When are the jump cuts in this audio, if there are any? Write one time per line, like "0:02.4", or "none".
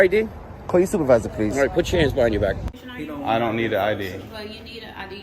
0:02.7